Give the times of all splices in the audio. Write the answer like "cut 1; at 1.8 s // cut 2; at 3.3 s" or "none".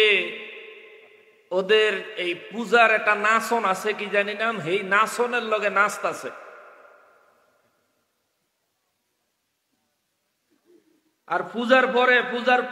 none